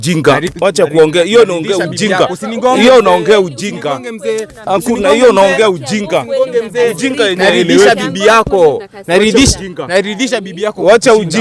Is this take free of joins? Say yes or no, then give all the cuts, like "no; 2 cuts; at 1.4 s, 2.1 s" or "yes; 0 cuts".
yes; 0 cuts